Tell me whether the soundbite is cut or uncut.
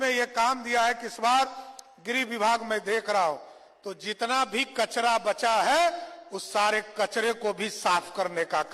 uncut